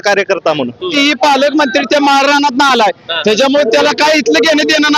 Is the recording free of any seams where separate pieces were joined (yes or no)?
no